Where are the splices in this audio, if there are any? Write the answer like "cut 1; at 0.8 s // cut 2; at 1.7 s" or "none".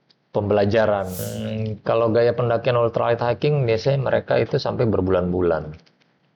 cut 1; at 1.3 s